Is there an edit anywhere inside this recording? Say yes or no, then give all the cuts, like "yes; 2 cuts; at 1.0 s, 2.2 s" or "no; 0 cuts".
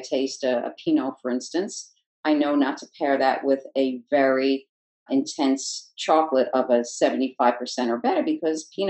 no; 0 cuts